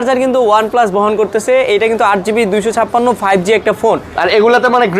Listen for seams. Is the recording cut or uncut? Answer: uncut